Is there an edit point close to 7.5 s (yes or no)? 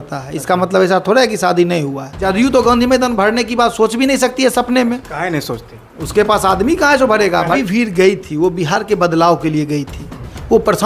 yes